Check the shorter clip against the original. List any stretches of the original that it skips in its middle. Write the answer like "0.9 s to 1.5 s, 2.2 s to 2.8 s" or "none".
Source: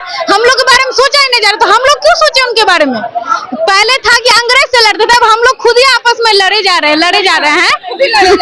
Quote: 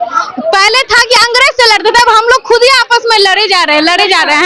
none